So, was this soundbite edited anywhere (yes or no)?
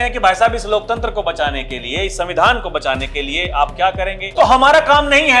yes